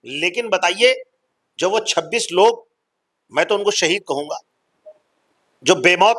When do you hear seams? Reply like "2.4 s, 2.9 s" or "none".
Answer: none